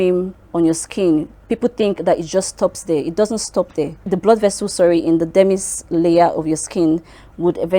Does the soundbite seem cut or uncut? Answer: cut